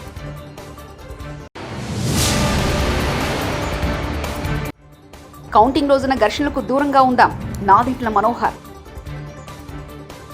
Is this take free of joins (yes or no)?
yes